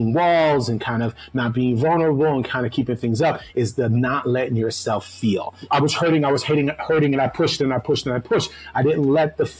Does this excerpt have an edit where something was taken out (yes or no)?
yes